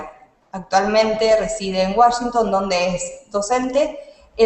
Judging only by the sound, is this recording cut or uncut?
uncut